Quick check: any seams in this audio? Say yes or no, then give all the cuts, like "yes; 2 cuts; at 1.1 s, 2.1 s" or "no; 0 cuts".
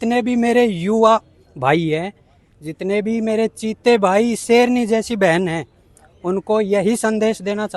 no; 0 cuts